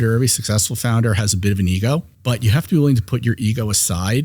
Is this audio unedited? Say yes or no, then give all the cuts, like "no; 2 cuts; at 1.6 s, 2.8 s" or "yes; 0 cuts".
no; 1 cut; at 2.1 s